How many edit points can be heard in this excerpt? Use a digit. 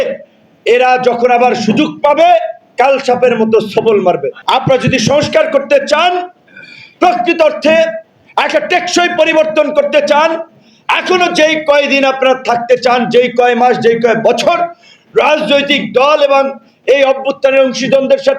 1